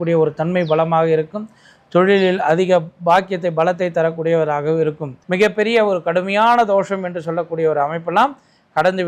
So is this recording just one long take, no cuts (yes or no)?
no